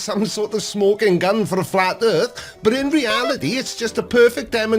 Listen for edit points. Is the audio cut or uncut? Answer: cut